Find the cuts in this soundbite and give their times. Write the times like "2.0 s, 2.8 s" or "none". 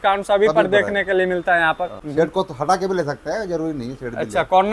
2.0 s